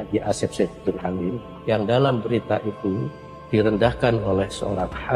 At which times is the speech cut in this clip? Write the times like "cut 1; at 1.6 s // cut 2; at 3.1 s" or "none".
cut 1; at 1.5 s